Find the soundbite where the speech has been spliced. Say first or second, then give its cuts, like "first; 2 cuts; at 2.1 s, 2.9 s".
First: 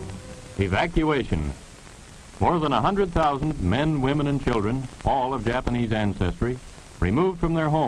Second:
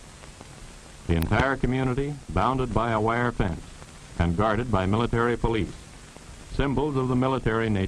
first; 1 cut; at 2.8 s